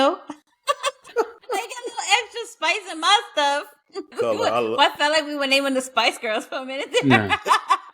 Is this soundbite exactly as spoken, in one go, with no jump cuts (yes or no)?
no